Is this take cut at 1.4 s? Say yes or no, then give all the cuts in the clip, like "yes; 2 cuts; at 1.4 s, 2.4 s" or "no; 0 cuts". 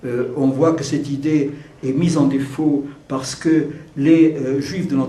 yes; 1 cut; at 1.4 s